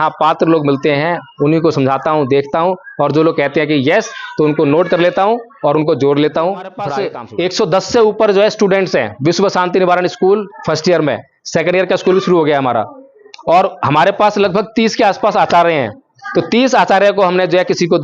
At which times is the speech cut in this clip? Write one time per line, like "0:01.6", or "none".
0:07.1